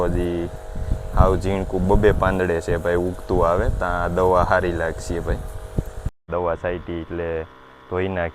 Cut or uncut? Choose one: cut